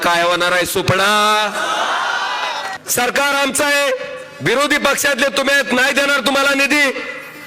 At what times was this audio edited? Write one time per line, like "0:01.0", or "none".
0:02.7